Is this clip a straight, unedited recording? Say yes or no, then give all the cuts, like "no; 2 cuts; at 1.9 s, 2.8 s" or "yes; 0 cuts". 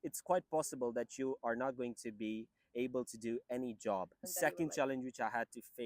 no; 1 cut; at 4.3 s